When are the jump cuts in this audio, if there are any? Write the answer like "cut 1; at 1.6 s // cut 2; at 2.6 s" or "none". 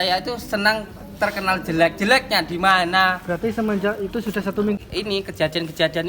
cut 1; at 4.8 s